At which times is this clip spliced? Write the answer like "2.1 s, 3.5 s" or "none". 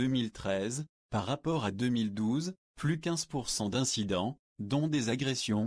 3.1 s

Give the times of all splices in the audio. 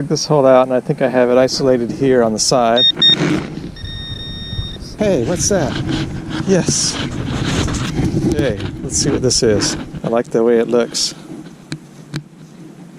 2.9 s, 4.9 s, 9.9 s

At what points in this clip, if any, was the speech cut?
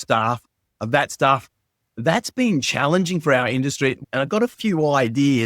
4.0 s

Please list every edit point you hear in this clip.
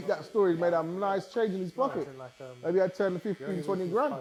none

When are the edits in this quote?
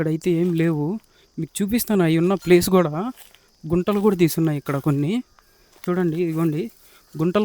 5.8 s

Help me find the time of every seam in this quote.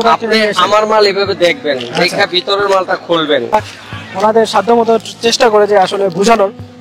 3.5 s

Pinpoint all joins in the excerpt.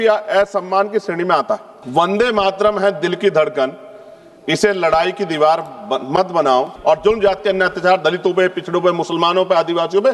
1.7 s, 6.7 s

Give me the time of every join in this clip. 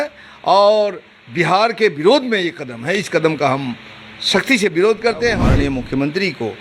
5.4 s

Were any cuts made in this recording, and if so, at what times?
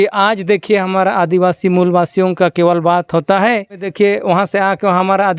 3.9 s

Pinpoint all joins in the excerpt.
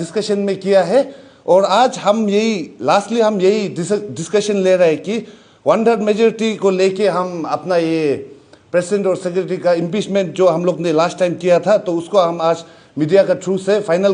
none

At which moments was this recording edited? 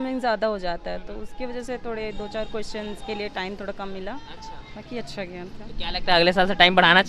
none

